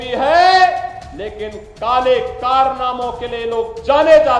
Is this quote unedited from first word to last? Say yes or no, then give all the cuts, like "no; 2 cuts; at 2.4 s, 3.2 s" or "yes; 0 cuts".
yes; 0 cuts